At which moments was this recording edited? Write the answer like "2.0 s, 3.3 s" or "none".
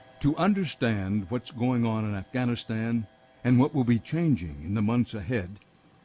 3.8 s